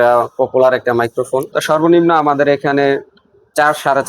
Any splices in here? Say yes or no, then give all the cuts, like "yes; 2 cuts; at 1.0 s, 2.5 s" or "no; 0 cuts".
yes; 1 cut; at 1.5 s